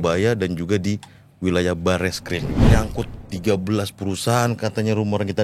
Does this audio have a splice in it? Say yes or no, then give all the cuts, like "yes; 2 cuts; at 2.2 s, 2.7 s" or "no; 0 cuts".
yes; 1 cut; at 2.7 s